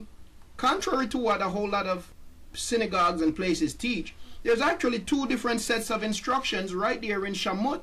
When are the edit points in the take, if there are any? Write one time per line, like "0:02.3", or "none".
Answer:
0:02.2